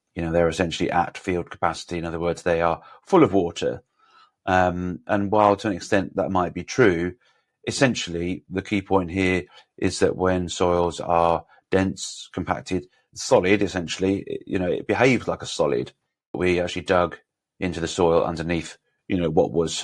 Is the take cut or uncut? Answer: cut